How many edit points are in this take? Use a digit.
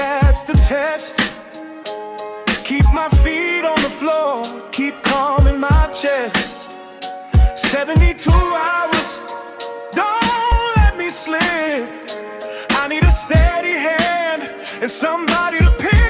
1